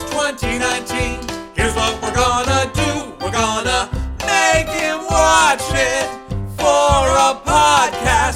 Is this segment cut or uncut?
uncut